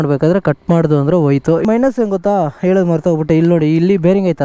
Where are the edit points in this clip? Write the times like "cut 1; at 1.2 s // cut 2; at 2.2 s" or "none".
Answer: cut 1; at 1.6 s

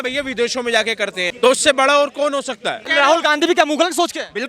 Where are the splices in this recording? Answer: cut 1; at 1.3 s // cut 2; at 2.9 s

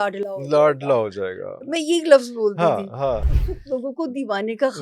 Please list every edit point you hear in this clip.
cut 1; at 3.2 s

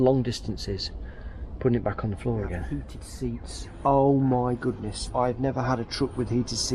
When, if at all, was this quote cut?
cut 1; at 3.4 s

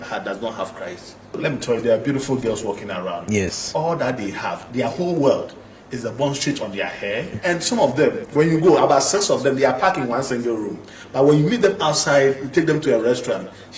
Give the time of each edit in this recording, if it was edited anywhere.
cut 1; at 1.4 s // cut 2; at 7.3 s

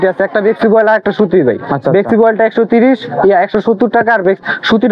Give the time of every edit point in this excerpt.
none

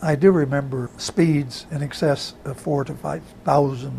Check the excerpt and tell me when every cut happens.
cut 1; at 1.0 s

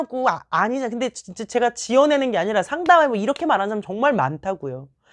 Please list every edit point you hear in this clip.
none

